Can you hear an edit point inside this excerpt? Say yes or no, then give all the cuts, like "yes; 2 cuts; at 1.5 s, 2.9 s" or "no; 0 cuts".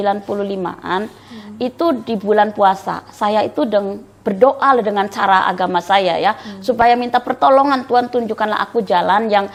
no; 0 cuts